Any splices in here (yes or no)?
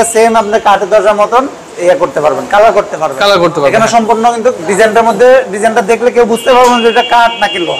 no